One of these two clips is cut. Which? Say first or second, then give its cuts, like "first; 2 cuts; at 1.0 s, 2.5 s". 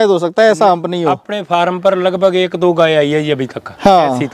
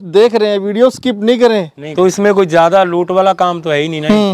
second; 1 cut; at 1.8 s